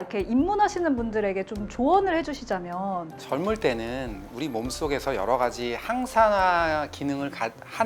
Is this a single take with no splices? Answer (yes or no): yes